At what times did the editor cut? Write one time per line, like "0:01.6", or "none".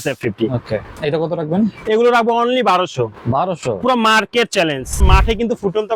0:00.9
0:05.0